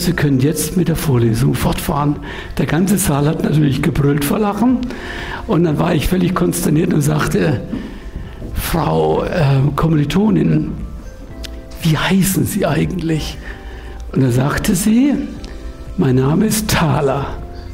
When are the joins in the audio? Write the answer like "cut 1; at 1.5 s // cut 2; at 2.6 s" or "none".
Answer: none

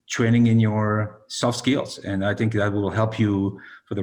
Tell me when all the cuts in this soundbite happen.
none

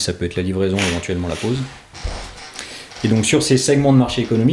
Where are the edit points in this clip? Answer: none

